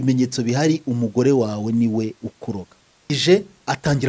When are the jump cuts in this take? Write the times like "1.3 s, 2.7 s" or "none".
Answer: 3.1 s